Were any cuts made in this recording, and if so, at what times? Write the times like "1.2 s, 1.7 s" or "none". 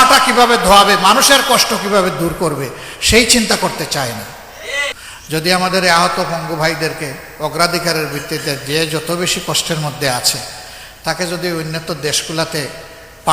5.0 s